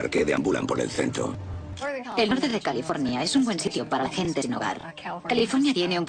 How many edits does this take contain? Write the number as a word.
one